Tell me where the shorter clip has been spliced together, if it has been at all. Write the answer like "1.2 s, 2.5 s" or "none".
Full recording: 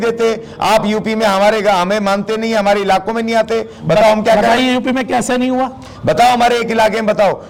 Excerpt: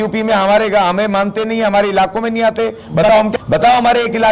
3.3 s